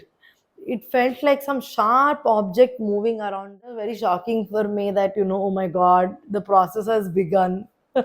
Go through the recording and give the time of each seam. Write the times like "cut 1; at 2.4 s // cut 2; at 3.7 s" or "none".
cut 1; at 3.7 s